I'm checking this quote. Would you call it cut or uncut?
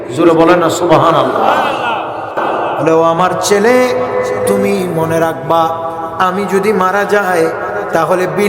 cut